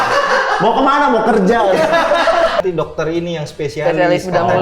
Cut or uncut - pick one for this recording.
cut